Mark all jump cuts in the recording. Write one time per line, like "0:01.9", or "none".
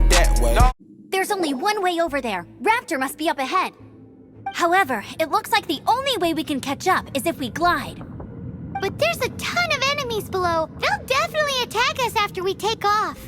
0:00.9